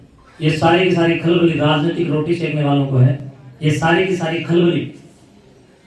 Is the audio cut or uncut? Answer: uncut